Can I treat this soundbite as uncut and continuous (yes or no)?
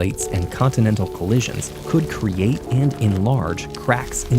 yes